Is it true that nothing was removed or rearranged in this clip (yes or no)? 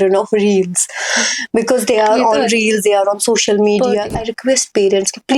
no